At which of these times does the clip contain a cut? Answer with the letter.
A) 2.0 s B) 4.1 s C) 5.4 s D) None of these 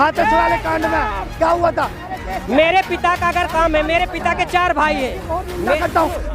A